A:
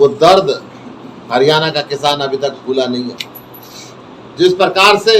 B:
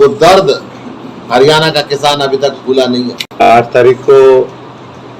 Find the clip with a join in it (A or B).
B